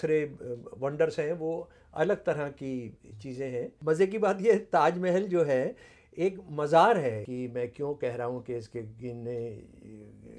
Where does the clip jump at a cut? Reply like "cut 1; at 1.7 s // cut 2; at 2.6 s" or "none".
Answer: cut 1; at 3.7 s // cut 2; at 7.2 s